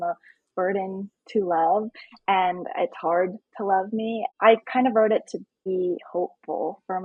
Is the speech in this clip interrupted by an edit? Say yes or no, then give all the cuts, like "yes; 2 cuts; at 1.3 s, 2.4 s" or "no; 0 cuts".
yes; 2 cuts; at 4.3 s, 5.6 s